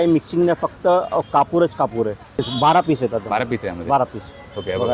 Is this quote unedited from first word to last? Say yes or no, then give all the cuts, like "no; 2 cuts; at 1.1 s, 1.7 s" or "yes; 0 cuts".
no; 1 cut; at 2.4 s